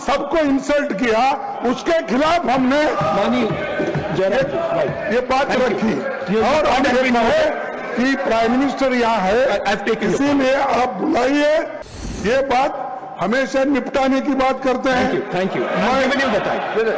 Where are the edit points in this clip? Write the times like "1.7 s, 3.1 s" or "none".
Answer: 11.9 s